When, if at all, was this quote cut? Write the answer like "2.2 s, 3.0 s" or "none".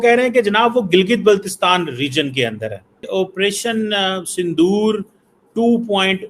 3.1 s